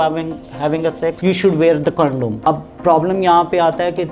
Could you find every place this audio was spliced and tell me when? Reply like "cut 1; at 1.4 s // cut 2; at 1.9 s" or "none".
cut 1; at 1.2 s // cut 2; at 2.3 s